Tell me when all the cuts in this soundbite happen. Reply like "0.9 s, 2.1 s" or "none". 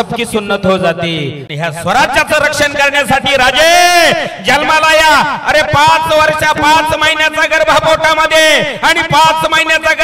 1.4 s